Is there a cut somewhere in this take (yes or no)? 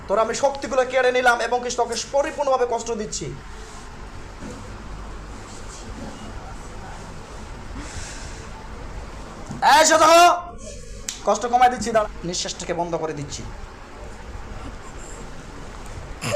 yes